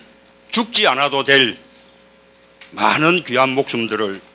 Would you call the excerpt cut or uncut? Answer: cut